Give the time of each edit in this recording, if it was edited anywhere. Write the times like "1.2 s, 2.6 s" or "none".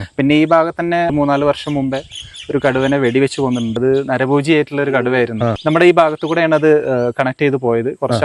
1.1 s, 3.8 s, 5.5 s